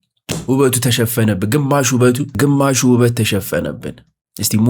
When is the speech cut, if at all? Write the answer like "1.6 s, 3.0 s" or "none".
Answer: none